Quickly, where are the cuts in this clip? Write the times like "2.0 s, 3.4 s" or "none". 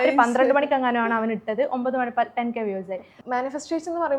3.1 s